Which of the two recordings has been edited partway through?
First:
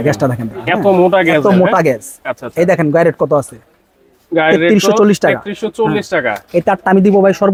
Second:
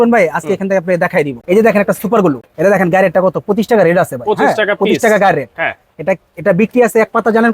second; 2 cuts; at 1.4 s, 2.5 s

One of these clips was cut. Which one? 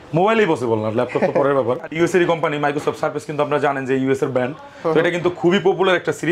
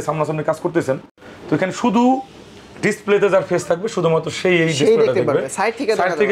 first; 1 cut; at 2.0 s

